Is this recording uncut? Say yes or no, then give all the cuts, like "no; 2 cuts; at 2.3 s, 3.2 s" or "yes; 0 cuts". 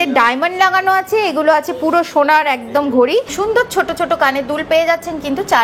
no; 1 cut; at 3.3 s